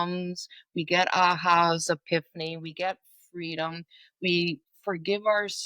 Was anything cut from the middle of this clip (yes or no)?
yes